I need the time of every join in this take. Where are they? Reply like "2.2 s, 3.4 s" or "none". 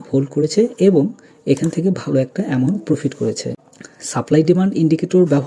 3.5 s